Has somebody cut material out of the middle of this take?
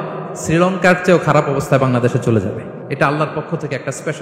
yes; 1 cut; at 2.8 s

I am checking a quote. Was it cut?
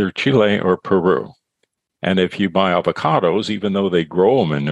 no; 0 cuts

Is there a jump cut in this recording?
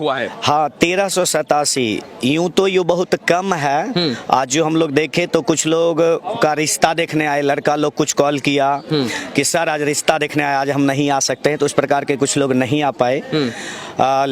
no; 0 cuts

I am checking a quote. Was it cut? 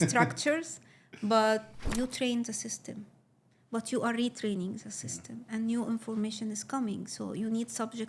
yes; 1 cut; at 1.8 s

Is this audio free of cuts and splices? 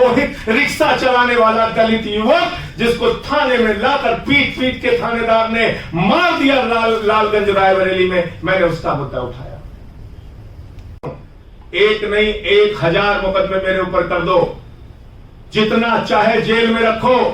no; 1 cut; at 11.2 s

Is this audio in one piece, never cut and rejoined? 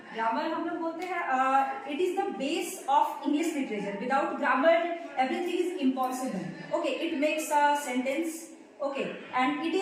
yes; 0 cuts

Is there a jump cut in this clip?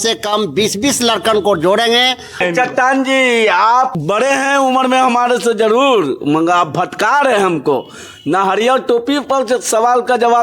yes; 1 cut; at 2.4 s

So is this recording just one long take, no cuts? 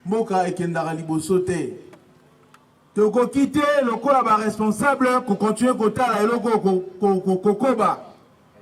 no; 1 cut; at 2.4 s

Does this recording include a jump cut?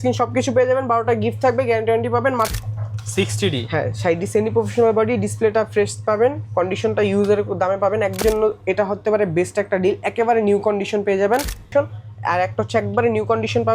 yes; 3 cuts; at 2.5 s, 8.2 s, 11.7 s

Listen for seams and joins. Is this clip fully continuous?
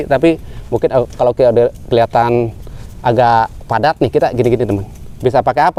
yes; 0 cuts

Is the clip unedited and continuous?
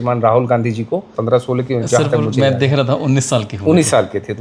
no; 1 cut; at 1.1 s

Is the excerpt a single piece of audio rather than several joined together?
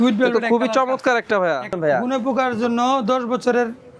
no; 1 cut; at 1.7 s

